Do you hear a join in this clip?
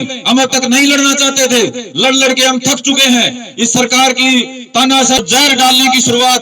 yes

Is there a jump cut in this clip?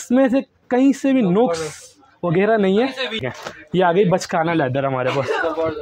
yes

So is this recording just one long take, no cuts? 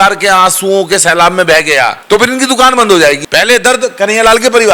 no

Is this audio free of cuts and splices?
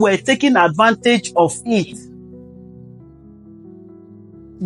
yes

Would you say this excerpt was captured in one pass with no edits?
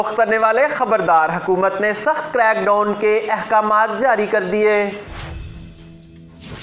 no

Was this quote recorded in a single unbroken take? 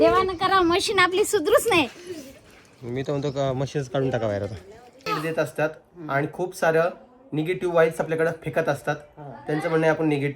no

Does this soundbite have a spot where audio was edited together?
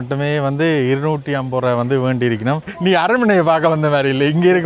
yes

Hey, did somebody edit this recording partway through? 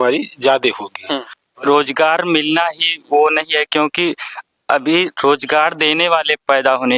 yes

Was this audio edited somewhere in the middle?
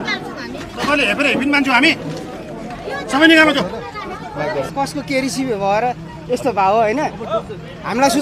yes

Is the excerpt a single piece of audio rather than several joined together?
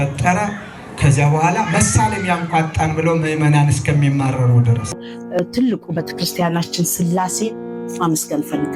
no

